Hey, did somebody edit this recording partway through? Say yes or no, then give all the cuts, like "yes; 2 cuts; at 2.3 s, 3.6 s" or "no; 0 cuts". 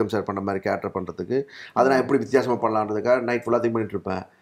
no; 0 cuts